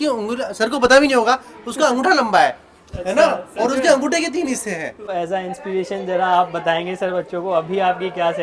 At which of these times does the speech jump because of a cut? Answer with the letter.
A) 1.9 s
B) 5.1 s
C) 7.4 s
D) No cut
B